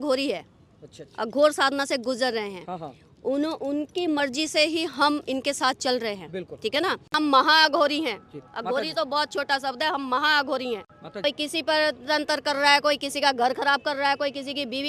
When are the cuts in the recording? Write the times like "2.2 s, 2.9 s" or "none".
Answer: 7.1 s, 11.2 s